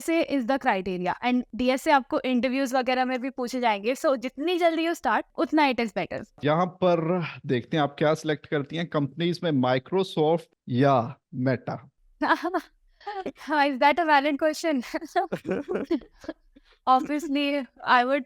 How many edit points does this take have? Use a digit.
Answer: 3